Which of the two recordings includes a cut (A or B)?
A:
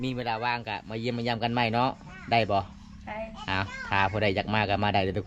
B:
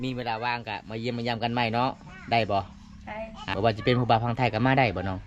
B